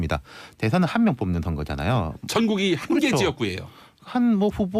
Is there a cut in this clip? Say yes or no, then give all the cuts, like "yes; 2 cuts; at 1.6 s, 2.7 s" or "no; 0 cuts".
no; 0 cuts